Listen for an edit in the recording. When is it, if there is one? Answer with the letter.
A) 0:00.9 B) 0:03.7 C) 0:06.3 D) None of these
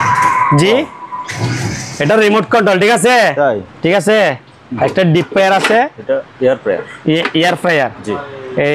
B